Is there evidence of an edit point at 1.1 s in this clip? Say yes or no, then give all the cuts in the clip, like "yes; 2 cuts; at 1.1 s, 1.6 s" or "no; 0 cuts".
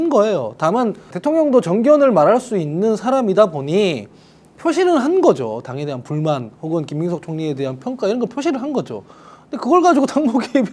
yes; 1 cut; at 1.1 s